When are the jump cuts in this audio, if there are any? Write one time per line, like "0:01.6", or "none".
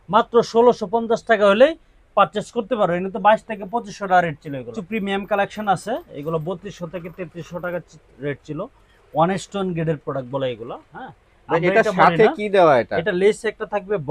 0:04.7